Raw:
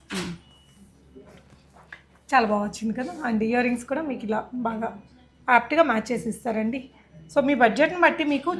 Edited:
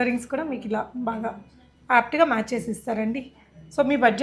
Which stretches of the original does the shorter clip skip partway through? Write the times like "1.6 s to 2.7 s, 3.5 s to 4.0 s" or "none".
none